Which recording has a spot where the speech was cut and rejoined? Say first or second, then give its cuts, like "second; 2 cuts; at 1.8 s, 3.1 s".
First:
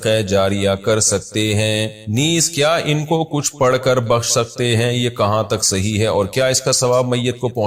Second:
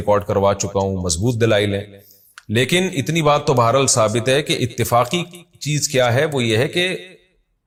first; 1 cut; at 2.0 s